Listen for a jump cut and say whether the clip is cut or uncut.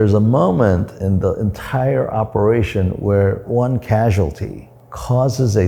cut